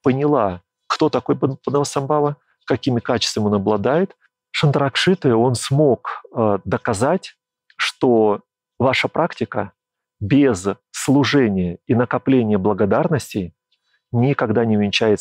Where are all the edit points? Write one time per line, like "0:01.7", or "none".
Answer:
0:04.2
0:08.6